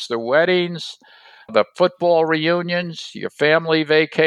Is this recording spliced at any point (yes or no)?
yes